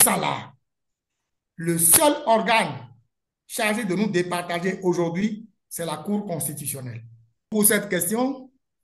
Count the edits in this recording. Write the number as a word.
one